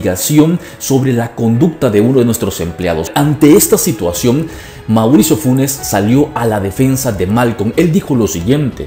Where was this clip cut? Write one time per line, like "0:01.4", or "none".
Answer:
0:03.1